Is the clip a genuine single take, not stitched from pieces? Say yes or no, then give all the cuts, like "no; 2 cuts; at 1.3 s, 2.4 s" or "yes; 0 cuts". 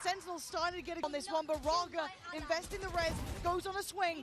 no; 1 cut; at 1.0 s